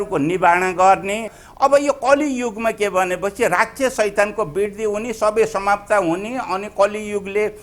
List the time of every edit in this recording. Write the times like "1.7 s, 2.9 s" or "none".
1.4 s